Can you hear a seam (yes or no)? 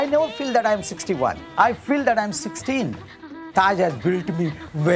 yes